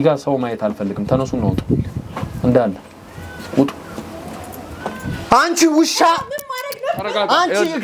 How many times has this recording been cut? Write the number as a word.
one